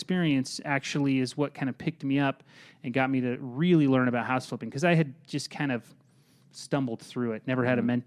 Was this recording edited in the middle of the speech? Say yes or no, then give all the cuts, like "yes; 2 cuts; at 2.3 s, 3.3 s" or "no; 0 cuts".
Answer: no; 0 cuts